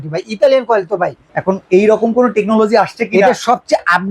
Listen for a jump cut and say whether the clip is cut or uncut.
cut